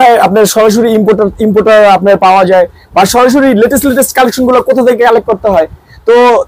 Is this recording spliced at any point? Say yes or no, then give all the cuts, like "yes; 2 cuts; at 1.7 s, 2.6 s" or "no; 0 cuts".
no; 0 cuts